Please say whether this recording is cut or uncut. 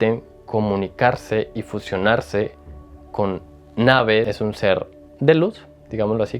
cut